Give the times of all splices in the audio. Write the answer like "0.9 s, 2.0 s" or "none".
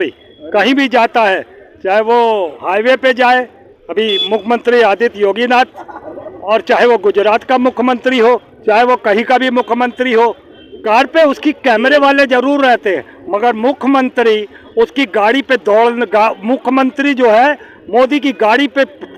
none